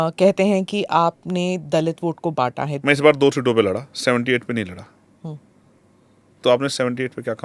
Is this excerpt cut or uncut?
cut